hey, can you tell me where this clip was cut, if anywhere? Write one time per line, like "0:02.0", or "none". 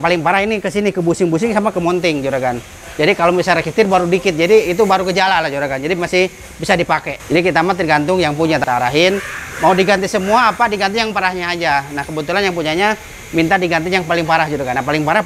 0:07.1
0:08.6